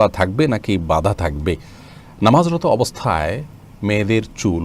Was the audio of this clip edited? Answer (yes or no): no